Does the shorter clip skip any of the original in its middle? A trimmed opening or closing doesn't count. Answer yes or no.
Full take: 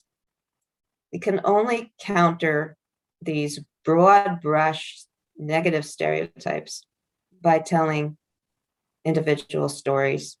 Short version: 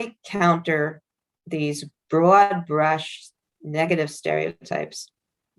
no